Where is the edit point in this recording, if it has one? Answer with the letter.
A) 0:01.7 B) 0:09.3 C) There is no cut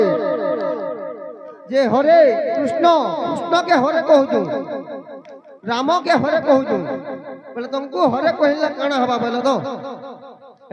C